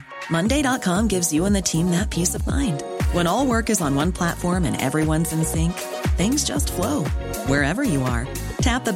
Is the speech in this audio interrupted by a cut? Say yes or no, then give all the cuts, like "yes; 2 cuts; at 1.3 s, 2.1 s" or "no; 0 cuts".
no; 0 cuts